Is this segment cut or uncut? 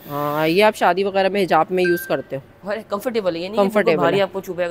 uncut